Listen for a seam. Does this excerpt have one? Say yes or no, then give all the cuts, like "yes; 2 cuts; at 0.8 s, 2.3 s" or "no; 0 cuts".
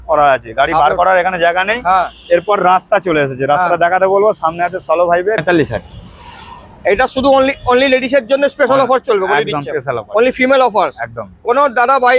yes; 1 cut; at 5.4 s